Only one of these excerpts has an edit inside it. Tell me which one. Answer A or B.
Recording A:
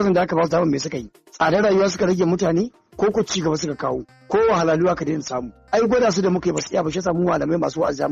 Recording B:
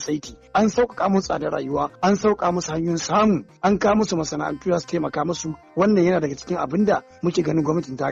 B